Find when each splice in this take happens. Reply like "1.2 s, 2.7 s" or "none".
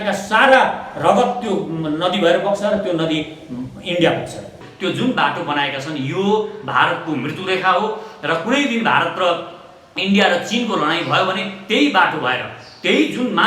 4.6 s

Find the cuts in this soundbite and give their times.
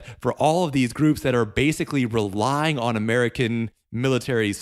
none

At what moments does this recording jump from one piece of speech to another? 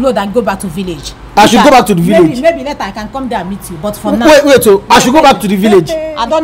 none

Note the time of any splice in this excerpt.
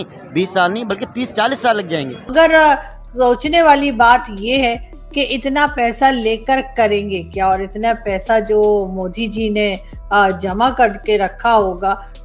2.2 s

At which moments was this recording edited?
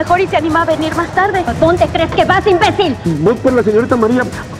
1.5 s, 3.0 s

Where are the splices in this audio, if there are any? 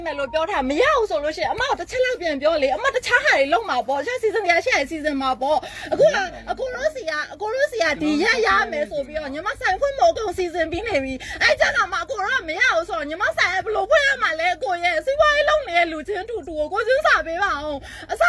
none

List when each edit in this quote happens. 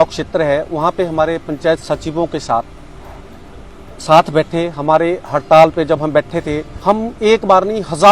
6.7 s

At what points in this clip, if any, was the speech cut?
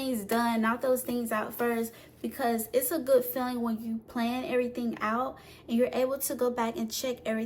none

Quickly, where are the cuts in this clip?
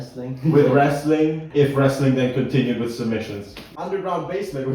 1.4 s, 3.6 s

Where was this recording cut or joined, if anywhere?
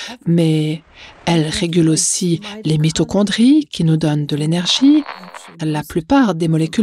5.2 s

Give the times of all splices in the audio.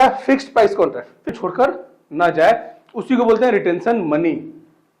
1.3 s

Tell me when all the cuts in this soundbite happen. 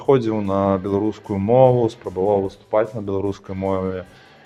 none

